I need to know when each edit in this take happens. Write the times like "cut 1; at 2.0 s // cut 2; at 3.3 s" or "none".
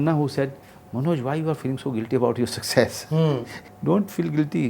cut 1; at 3.6 s